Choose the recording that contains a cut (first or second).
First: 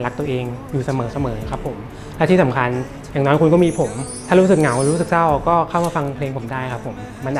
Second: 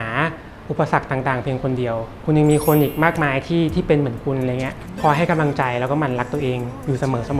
second